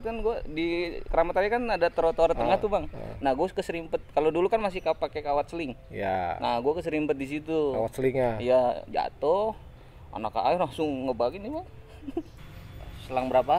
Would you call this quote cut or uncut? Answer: cut